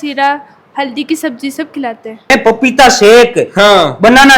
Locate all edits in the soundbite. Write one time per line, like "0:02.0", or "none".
0:02.3